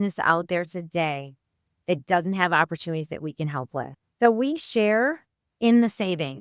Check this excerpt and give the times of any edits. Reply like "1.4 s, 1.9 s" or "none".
4.0 s

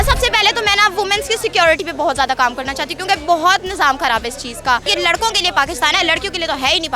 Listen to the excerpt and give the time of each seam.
4.9 s

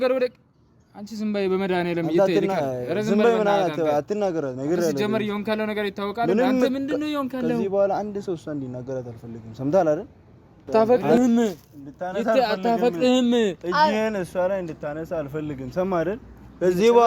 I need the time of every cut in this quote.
10.6 s

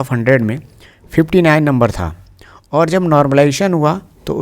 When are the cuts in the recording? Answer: none

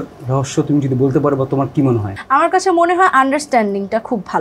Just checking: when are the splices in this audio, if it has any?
2.1 s

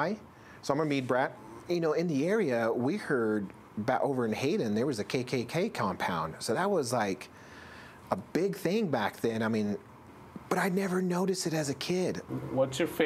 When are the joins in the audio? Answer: 1.3 s, 10.0 s, 12.2 s

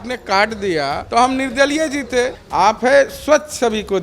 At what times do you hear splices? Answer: 1.0 s, 2.4 s

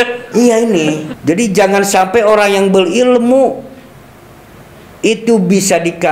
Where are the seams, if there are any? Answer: 1.1 s

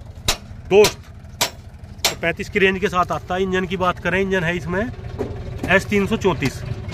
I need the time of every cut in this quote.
none

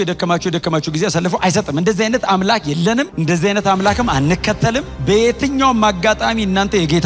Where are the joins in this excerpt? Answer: 3.1 s, 4.9 s

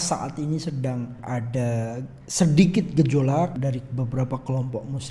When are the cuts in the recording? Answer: 1.2 s, 3.6 s

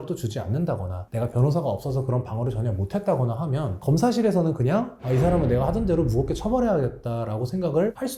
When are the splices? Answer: none

